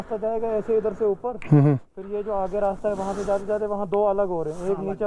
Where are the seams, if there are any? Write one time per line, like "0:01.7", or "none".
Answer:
none